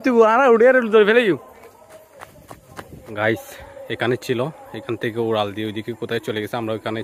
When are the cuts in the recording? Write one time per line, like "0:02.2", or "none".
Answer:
0:01.7
0:03.1